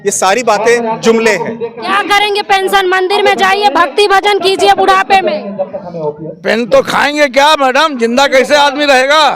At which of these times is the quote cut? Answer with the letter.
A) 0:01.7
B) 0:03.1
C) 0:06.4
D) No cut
A